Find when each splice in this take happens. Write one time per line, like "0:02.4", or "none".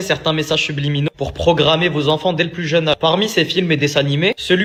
none